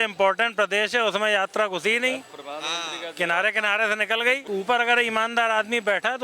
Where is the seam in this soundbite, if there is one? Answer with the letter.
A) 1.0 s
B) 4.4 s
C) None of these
B